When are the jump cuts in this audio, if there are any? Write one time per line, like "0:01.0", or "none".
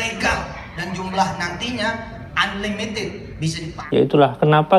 0:03.7

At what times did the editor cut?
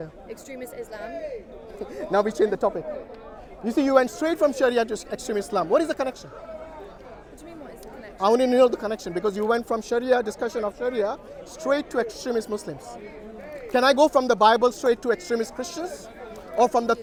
none

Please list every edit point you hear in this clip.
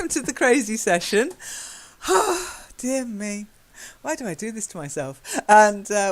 0:02.9

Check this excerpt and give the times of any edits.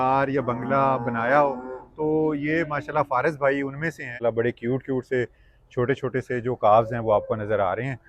0:04.1

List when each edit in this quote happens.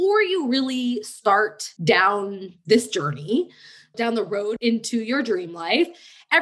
0:02.1
0:04.6

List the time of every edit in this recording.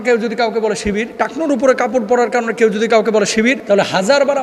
0:01.1
0:03.6

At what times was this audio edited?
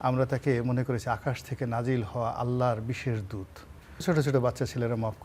0:04.0

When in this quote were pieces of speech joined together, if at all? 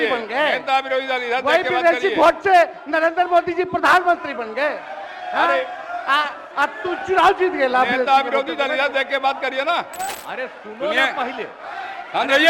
0:10.1

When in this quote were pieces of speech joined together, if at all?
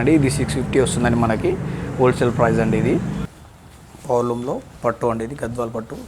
0:03.3

